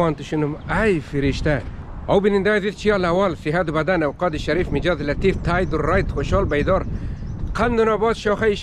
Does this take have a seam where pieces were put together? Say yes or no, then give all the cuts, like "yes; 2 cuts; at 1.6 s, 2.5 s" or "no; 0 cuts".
yes; 1 cut; at 1.7 s